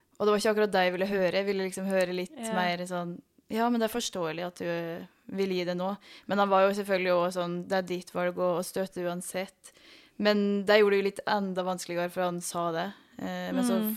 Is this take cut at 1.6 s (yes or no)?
no